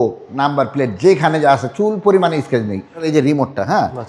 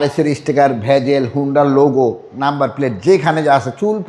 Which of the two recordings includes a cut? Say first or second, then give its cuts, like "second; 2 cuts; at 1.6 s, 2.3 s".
first; 1 cut; at 3.1 s